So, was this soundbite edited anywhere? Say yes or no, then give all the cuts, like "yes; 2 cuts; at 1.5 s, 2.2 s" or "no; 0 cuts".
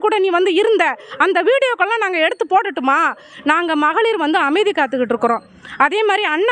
no; 0 cuts